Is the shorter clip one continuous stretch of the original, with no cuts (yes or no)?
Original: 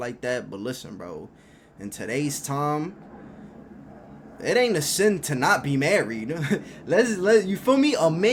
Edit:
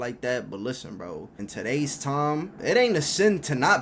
no